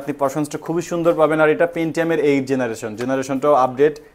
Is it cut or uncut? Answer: uncut